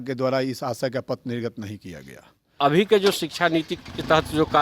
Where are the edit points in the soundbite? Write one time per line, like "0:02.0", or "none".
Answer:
0:02.5

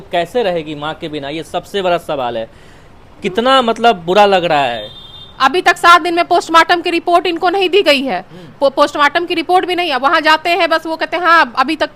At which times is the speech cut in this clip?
0:05.3

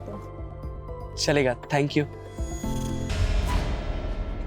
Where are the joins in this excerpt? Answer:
0:03.1

